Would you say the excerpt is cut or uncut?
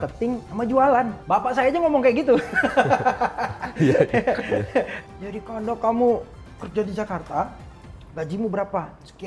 cut